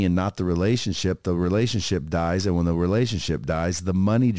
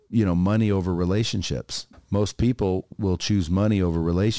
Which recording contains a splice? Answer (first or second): second